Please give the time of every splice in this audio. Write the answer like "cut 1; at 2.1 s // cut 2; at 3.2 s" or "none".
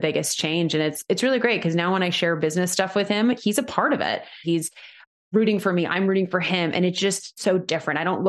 cut 1; at 4.4 s // cut 2; at 7.3 s